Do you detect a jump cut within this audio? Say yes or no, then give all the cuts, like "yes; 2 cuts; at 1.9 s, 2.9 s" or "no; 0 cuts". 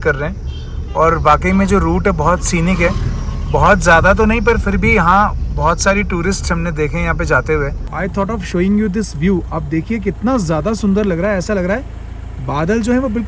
no; 0 cuts